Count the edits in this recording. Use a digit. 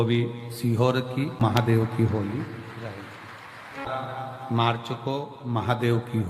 1